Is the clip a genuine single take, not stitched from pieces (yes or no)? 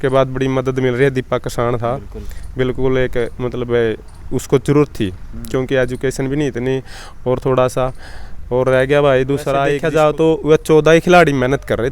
no